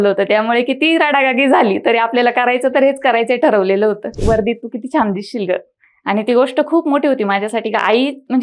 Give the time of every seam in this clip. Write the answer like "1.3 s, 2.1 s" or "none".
4.2 s